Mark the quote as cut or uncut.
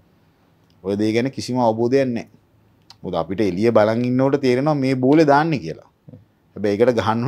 uncut